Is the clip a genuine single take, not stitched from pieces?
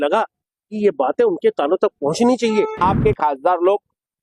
no; 1 cut; at 2.8 s

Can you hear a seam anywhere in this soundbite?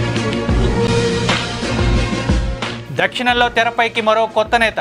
yes; 1 cut; at 2.8 s

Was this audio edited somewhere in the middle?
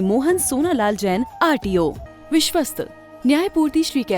yes; 1 cut; at 2.1 s

